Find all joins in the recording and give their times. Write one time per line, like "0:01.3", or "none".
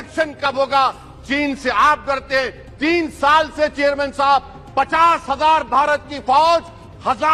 none